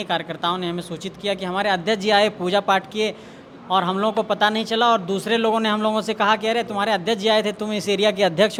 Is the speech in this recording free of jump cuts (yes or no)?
yes